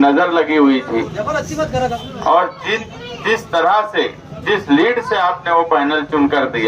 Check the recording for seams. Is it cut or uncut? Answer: cut